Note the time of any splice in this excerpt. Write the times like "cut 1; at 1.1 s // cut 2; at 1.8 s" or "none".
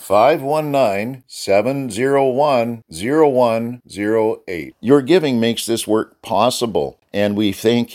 cut 1; at 7.0 s